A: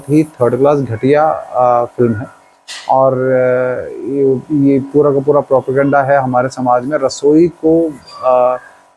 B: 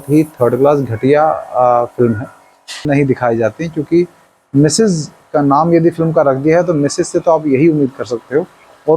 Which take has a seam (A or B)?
B